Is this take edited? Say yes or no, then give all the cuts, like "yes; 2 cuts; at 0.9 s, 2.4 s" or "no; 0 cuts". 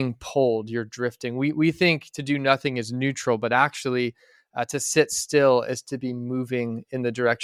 no; 0 cuts